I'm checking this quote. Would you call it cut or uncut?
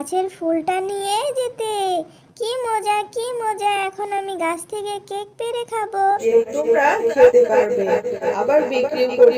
cut